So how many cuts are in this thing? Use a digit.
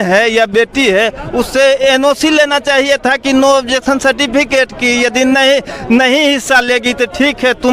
0